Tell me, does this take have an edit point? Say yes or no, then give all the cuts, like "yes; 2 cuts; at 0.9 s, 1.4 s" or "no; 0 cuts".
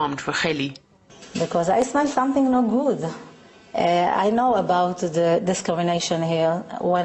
yes; 1 cut; at 2.8 s